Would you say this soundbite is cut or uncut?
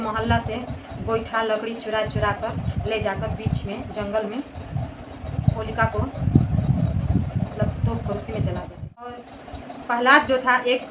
cut